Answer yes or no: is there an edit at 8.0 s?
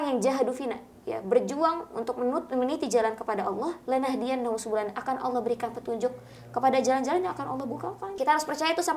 yes